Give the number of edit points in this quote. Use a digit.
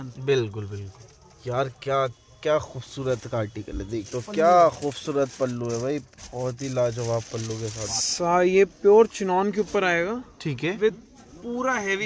2